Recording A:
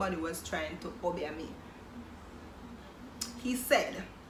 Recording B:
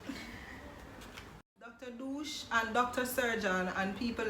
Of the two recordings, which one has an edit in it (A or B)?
B